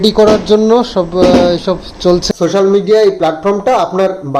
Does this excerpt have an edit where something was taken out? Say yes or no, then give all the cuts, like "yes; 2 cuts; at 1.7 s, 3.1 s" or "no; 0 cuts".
yes; 1 cut; at 2.2 s